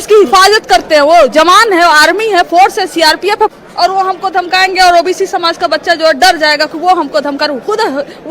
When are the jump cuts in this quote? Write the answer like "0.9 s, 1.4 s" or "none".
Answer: 3.6 s